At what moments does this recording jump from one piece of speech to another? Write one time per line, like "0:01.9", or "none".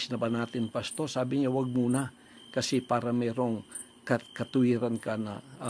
0:01.6